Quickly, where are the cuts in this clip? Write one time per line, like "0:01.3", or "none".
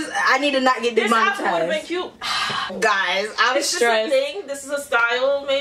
0:02.2